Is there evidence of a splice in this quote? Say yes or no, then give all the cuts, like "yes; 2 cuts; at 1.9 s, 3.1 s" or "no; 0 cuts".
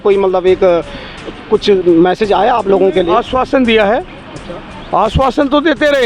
no; 0 cuts